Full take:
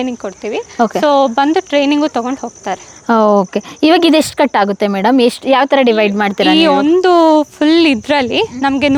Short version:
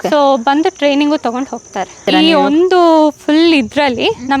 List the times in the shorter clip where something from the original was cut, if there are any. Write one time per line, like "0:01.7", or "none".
0:02.0